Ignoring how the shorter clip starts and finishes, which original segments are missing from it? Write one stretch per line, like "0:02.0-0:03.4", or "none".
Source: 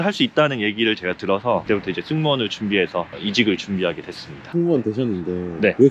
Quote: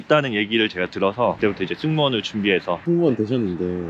0:03.1-0:04.5